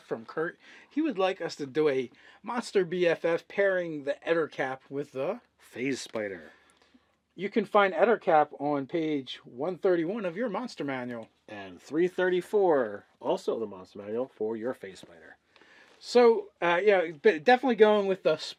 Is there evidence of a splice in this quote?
no; 0 cuts

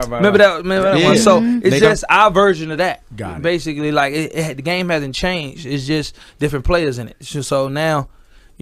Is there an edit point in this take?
no; 0 cuts

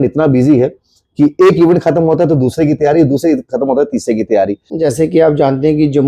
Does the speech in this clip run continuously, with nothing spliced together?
no; 1 cut; at 4.7 s

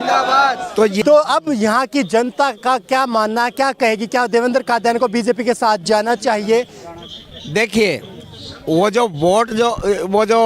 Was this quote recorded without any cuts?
no; 1 cut; at 1.0 s

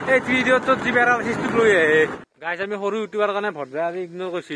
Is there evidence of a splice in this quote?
yes; 1 cut; at 2.2 s

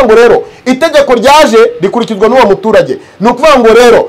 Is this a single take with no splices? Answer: yes; 0 cuts

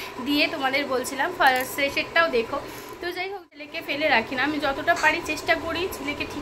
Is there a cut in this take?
no; 0 cuts

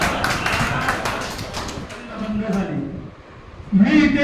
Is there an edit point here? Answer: yes; 1 cut; at 2.1 s

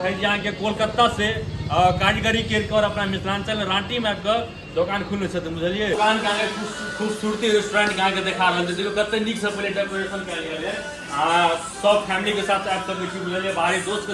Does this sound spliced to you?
yes; 1 cut; at 5.9 s

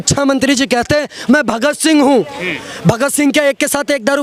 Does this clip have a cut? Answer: no; 0 cuts

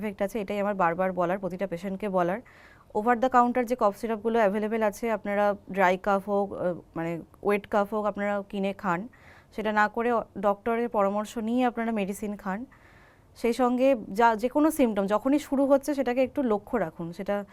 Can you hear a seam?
no; 0 cuts

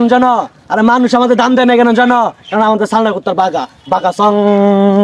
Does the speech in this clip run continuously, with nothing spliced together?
yes; 0 cuts

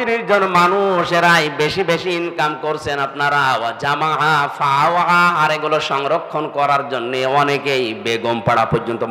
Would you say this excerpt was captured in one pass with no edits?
yes; 0 cuts

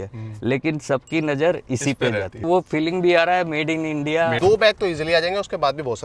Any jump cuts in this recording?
yes; 2 cuts; at 2.4 s, 4.4 s

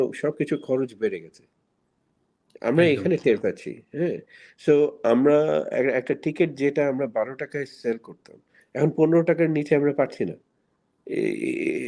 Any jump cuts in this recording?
no; 0 cuts

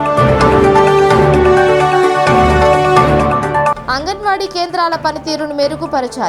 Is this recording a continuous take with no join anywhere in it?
no; 1 cut; at 1.0 s

